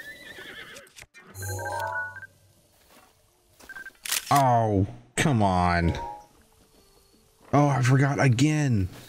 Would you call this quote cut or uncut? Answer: cut